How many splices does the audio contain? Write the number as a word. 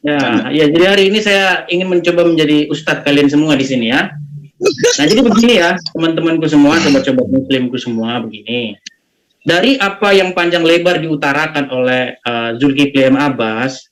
zero